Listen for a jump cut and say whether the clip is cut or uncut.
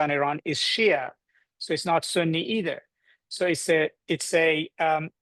uncut